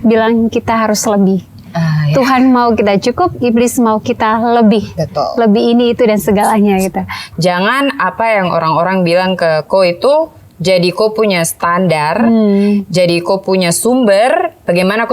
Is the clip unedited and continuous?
no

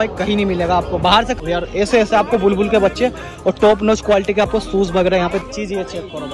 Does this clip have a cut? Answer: yes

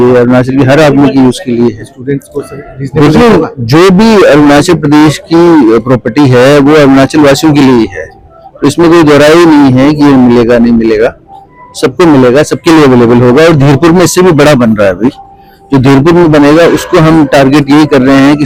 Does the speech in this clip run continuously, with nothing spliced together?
yes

